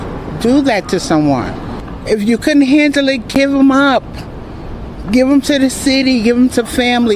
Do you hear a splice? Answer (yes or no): no